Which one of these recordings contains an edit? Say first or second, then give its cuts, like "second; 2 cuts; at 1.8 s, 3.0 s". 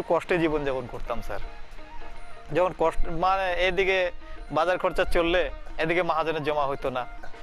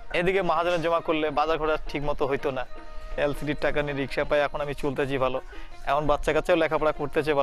second; 1 cut; at 3.2 s